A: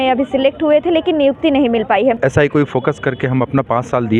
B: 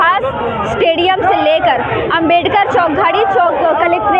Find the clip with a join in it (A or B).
A